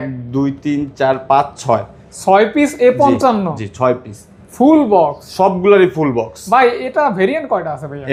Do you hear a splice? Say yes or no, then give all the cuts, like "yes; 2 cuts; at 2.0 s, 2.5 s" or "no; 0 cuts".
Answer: no; 0 cuts